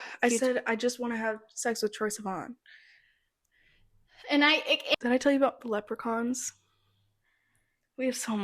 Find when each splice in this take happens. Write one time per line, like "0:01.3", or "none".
0:04.9